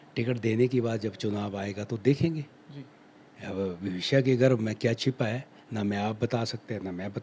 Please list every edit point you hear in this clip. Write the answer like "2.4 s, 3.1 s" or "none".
none